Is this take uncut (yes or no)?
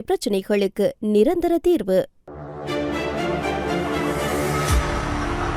no